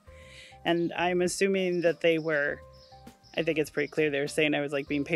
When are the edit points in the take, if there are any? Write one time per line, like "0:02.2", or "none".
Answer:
none